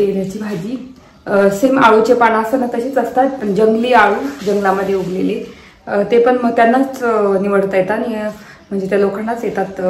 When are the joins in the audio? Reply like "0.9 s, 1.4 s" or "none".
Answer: none